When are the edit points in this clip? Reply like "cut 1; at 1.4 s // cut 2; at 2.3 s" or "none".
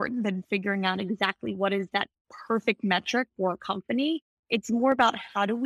none